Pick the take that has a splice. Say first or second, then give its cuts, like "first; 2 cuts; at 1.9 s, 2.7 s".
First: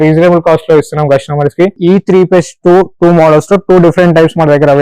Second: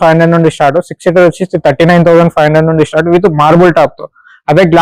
first; 1 cut; at 1.8 s